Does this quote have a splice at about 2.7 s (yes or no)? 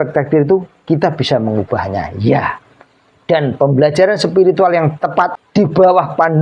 no